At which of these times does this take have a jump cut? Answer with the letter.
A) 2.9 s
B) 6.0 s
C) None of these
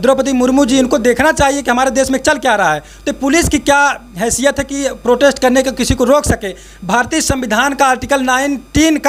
C